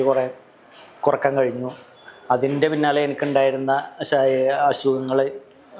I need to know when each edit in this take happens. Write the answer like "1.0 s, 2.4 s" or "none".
none